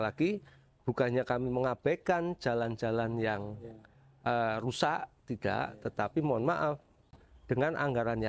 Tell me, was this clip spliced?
no; 0 cuts

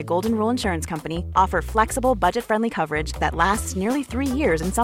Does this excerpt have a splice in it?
no; 0 cuts

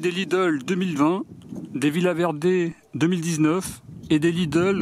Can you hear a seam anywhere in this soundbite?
no; 0 cuts

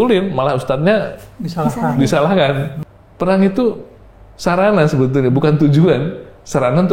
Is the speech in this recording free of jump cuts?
no; 1 cut; at 2.7 s

